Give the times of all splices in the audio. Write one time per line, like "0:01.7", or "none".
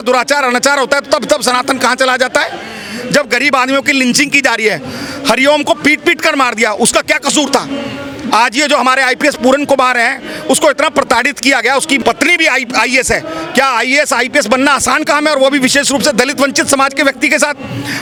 none